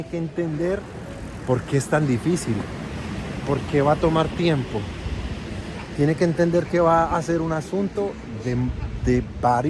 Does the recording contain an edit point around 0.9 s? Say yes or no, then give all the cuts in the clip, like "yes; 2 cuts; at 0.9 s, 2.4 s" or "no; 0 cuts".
no; 0 cuts